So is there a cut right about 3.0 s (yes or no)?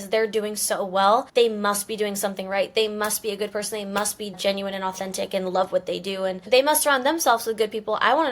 no